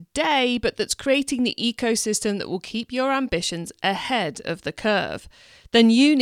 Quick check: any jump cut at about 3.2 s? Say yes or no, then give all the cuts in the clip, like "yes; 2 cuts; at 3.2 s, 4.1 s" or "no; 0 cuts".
no; 0 cuts